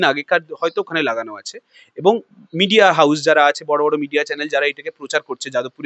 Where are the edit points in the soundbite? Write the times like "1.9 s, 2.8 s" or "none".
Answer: none